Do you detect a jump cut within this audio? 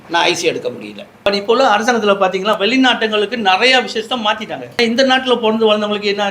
yes; 2 cuts; at 1.1 s, 4.7 s

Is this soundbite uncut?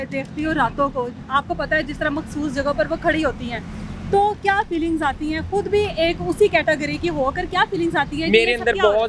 yes; 0 cuts

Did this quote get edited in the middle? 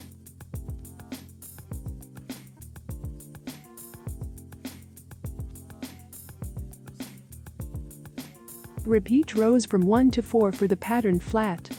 no; 0 cuts

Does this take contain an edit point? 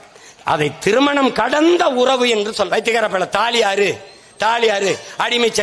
yes; 1 cut; at 2.7 s

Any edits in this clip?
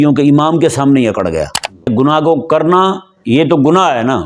yes; 1 cut; at 1.9 s

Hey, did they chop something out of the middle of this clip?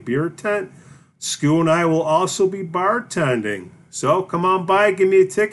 no; 0 cuts

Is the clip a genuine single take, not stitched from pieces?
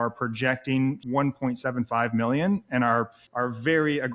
no; 2 cuts; at 1.0 s, 3.2 s

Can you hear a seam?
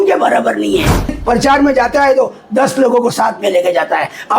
yes; 1 cut; at 1.2 s

